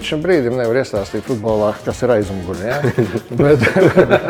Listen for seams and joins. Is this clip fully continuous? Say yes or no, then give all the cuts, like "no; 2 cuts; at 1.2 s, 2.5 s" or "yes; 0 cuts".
yes; 0 cuts